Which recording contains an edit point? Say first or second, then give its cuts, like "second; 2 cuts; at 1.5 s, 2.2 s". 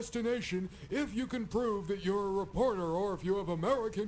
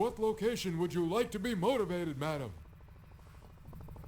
second; 1 cut; at 2.7 s